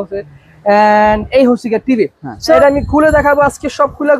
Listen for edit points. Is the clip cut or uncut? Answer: cut